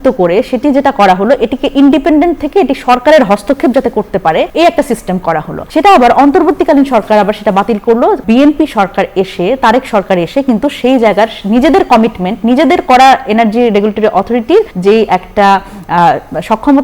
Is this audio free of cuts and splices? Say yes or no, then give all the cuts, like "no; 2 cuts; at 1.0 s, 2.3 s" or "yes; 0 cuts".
no; 4 cuts; at 4.5 s, 5.6 s, 8.2 s, 14.7 s